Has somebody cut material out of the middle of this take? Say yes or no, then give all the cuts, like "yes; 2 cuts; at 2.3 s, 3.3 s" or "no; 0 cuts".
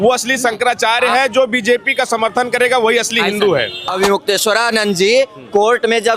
yes; 1 cut; at 3.8 s